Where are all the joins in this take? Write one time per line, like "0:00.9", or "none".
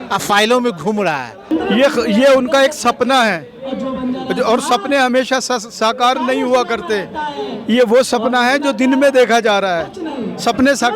0:01.5